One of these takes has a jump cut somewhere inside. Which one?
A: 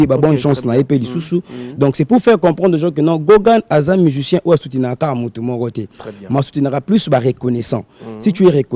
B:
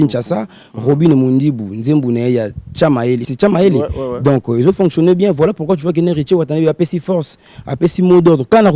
B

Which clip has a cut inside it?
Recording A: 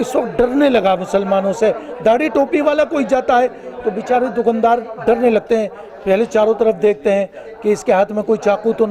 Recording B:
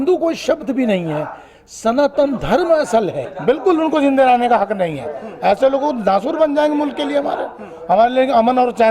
B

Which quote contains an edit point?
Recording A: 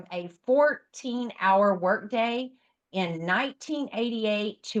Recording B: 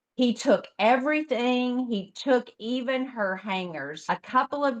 B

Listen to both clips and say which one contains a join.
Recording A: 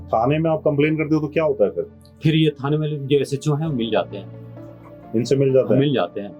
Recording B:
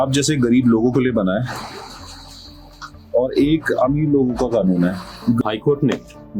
B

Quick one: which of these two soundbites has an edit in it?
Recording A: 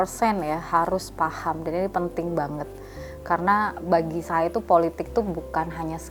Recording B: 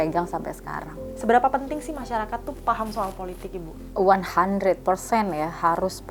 B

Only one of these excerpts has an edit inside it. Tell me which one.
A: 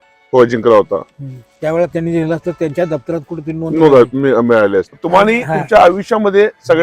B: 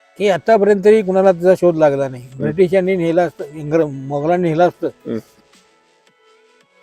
A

